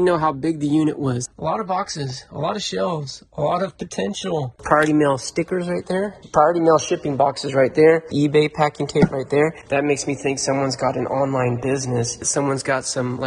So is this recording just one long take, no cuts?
no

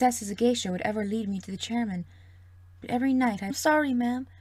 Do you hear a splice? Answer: no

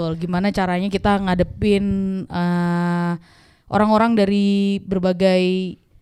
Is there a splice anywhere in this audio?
no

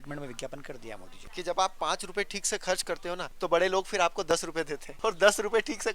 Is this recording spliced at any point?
yes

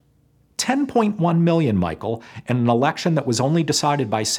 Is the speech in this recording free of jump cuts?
yes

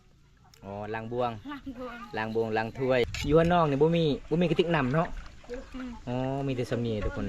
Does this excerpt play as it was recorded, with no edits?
no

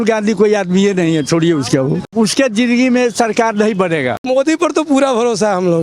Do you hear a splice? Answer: yes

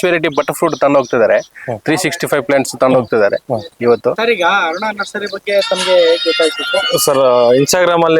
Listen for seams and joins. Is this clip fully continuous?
yes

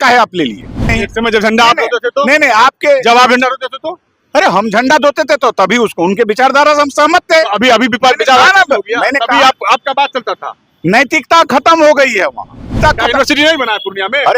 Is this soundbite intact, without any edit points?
no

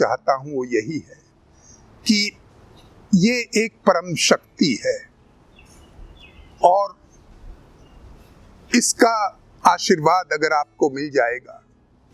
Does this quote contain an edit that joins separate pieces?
no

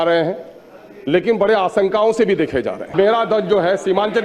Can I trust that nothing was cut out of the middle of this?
no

